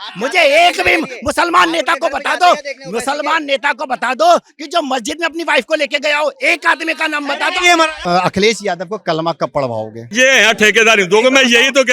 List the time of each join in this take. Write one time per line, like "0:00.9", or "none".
0:08.0
0:10.0